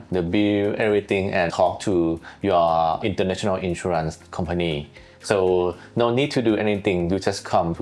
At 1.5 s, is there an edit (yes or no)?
yes